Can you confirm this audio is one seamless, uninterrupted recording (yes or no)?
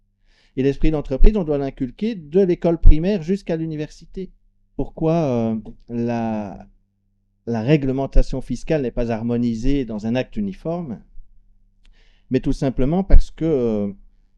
no